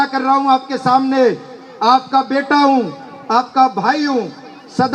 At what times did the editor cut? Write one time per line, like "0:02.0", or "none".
none